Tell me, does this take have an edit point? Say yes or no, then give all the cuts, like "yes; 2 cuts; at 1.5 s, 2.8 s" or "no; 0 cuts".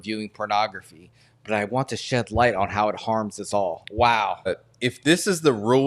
yes; 1 cut; at 4.6 s